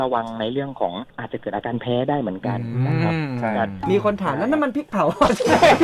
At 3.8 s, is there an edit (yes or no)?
yes